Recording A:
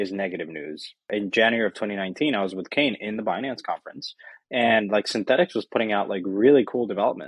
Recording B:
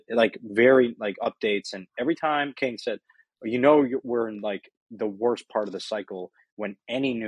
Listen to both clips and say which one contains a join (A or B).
A